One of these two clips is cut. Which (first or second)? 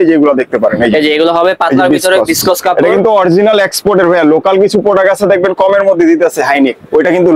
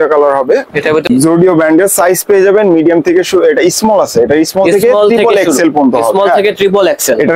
second